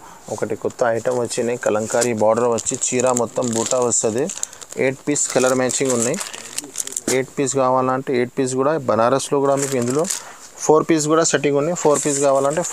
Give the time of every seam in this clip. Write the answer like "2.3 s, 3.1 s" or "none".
none